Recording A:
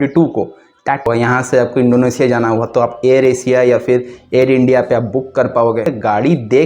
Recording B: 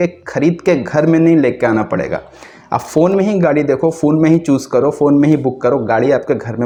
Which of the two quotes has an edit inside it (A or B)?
A